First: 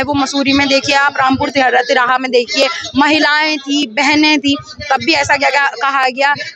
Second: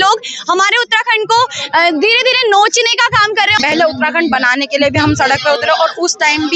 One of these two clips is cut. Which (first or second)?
second